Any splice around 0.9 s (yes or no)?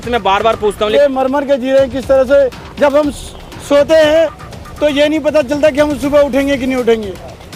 yes